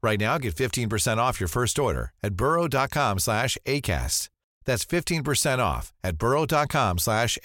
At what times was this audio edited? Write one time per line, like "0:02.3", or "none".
none